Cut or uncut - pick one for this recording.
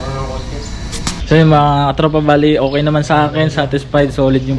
cut